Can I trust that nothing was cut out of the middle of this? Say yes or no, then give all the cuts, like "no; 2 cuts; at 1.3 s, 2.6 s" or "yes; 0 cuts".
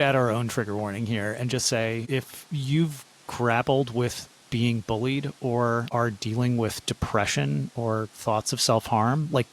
no; 2 cuts; at 2.0 s, 5.9 s